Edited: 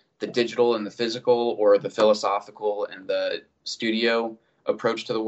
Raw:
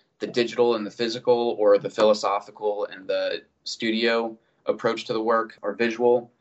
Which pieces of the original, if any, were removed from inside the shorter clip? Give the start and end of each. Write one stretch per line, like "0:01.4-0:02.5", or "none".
none